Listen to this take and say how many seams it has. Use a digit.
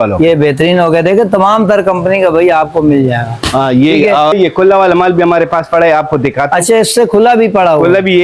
1